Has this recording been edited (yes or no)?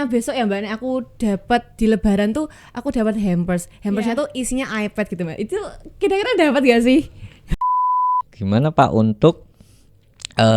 yes